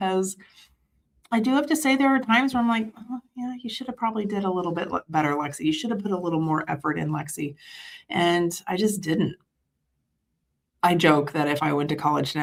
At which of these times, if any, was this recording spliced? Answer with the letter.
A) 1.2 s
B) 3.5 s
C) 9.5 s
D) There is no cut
D